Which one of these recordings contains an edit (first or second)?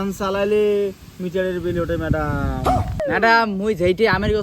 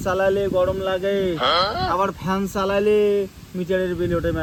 first